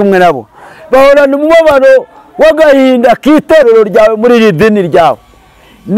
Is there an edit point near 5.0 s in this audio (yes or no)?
no